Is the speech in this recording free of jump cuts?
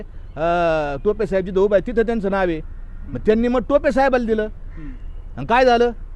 yes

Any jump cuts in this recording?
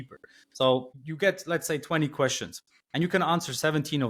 no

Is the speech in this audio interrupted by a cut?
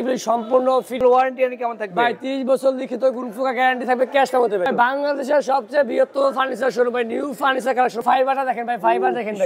yes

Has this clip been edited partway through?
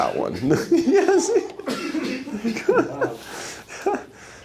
no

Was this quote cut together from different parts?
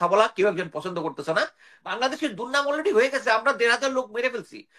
yes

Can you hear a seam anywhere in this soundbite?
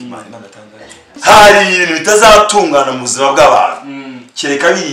yes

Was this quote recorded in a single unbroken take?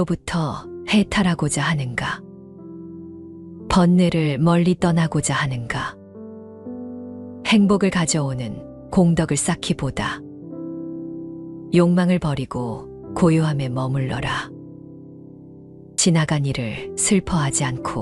yes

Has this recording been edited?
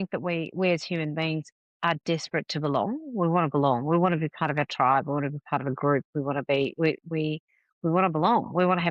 no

